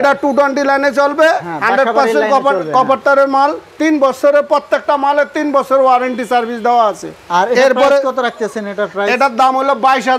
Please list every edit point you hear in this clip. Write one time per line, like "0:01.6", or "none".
none